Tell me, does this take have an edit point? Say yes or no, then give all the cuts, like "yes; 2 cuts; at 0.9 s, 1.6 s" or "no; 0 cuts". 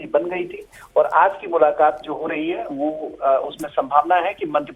yes; 1 cut; at 2.4 s